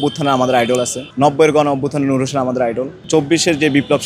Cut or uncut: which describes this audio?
cut